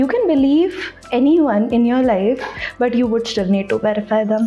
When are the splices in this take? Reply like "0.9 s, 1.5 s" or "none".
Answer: none